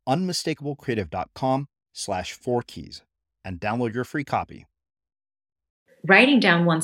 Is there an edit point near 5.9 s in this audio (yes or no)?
yes